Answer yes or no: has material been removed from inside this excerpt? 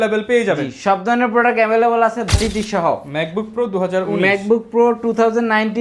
yes